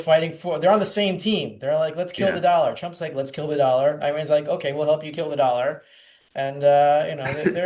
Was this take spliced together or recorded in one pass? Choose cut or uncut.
uncut